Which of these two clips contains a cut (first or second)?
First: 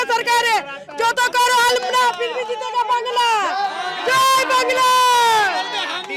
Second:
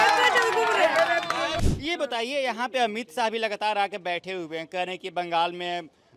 second